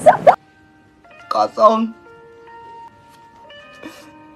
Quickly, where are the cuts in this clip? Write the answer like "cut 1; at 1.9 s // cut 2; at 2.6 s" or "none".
none